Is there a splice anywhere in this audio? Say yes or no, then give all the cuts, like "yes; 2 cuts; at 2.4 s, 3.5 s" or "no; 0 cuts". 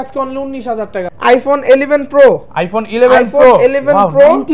yes; 1 cut; at 1.1 s